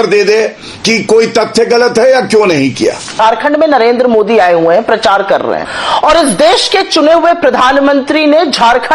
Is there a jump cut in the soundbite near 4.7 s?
no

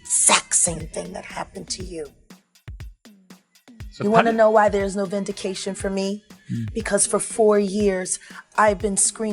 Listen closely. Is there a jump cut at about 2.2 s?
yes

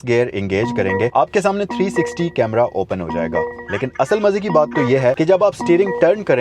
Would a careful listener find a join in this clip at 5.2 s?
yes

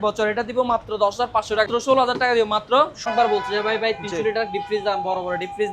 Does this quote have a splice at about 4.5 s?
no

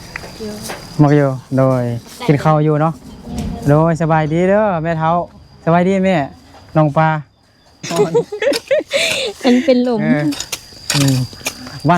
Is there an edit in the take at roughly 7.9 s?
yes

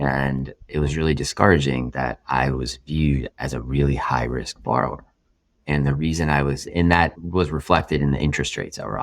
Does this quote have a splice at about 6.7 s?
yes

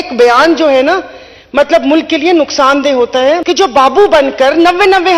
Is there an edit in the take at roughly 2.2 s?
no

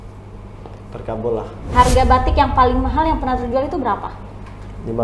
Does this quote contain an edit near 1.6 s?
yes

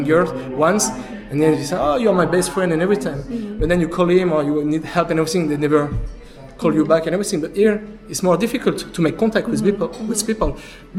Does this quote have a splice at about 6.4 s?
no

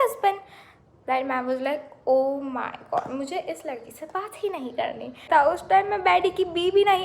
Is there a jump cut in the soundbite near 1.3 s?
no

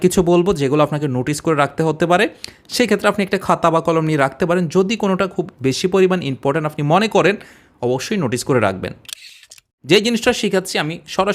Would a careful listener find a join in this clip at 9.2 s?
yes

